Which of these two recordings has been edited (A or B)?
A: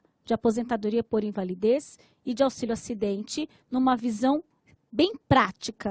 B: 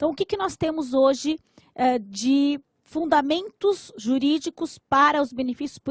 B